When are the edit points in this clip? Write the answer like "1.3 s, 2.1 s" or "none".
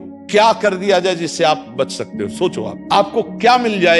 2.7 s